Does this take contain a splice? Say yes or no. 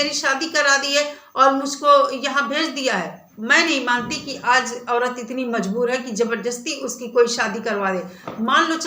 yes